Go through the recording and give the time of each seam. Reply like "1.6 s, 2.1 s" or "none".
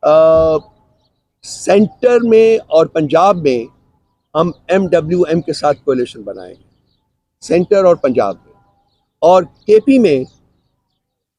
none